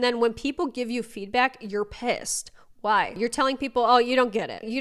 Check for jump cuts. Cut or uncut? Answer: uncut